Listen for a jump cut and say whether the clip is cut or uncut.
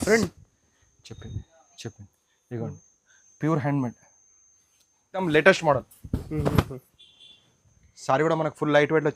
cut